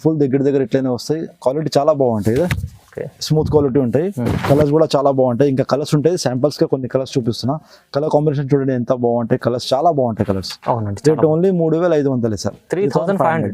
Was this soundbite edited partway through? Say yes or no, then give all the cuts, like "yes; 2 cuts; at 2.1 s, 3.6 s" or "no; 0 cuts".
no; 0 cuts